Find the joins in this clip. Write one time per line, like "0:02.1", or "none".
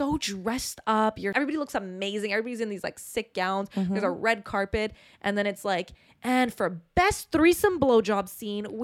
0:01.3